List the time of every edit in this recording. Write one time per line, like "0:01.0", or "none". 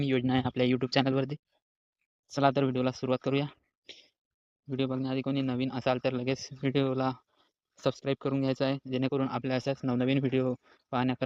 none